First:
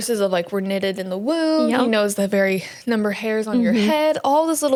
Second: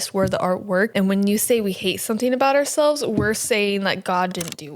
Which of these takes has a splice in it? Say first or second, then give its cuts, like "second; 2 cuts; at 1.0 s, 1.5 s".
second; 1 cut; at 0.9 s